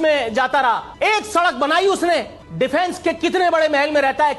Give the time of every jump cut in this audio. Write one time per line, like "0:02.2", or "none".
0:00.9
0:02.4